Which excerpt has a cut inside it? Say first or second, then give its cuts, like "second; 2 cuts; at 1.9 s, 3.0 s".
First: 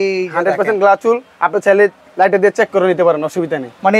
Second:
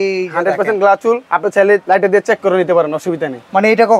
second; 1 cut; at 1.6 s